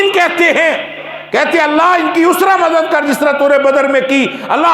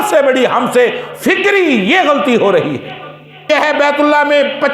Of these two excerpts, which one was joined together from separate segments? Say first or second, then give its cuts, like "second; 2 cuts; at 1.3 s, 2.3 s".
second; 1 cut; at 3.5 s